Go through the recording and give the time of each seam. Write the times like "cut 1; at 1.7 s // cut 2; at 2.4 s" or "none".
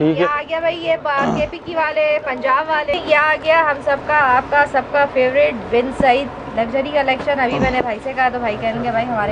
cut 1; at 2.9 s